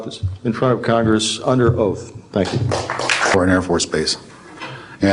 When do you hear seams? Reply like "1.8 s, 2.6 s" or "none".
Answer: 3.3 s